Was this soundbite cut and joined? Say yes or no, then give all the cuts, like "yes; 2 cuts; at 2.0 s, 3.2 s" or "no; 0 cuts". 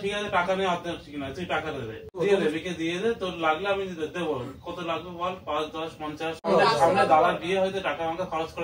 yes; 2 cuts; at 2.1 s, 6.5 s